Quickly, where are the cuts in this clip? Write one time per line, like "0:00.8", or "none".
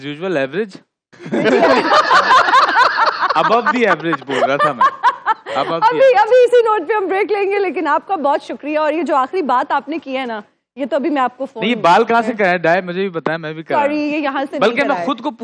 none